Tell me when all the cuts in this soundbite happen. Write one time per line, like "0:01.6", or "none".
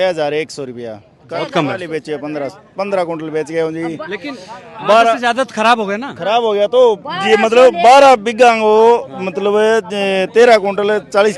none